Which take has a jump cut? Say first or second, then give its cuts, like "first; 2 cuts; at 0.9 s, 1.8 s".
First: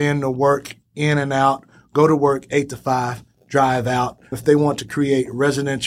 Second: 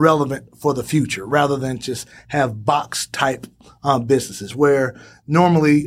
first; 1 cut; at 4.4 s